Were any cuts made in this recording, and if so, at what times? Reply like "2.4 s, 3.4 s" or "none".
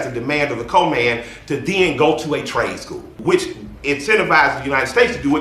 3.2 s